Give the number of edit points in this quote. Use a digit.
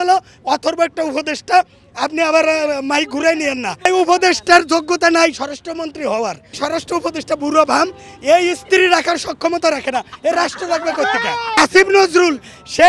3